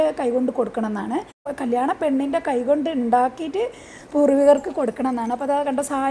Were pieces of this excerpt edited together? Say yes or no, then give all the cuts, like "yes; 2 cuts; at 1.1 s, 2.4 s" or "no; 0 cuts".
yes; 1 cut; at 1.3 s